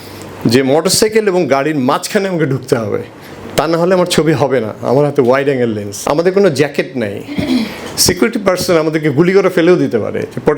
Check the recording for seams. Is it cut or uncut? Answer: cut